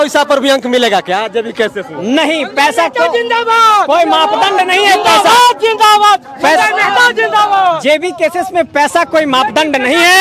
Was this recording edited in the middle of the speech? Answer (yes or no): no